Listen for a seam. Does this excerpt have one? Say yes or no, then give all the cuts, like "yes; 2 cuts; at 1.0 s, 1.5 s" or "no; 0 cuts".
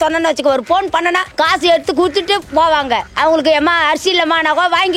yes; 3 cuts; at 1.3 s, 2.5 s, 3.1 s